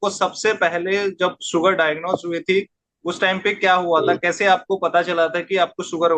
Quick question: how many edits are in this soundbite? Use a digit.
0